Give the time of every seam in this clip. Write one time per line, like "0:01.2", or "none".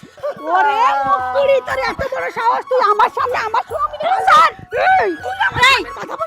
none